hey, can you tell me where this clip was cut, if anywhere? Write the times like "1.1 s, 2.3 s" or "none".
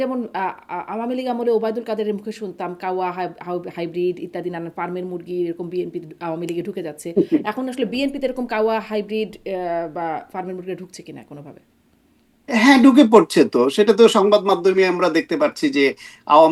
none